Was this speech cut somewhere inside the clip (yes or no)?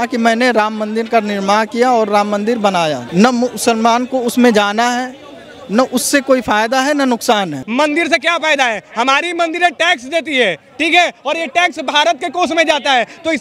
yes